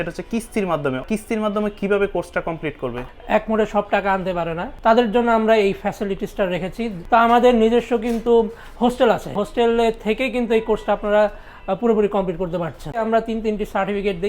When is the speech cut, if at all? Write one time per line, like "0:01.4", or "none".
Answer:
0:01.0
0:03.1
0:04.6
0:07.0
0:09.4
0:13.0